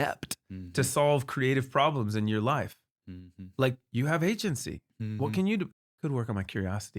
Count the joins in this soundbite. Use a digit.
1